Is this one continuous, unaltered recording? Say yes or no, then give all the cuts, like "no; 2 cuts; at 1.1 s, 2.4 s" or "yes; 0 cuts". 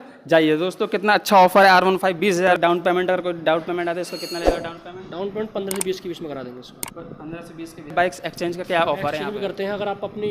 no; 2 cuts; at 2.6 s, 7.9 s